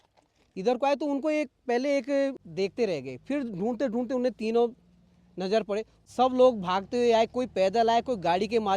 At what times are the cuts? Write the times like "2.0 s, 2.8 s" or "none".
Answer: 2.4 s, 5.9 s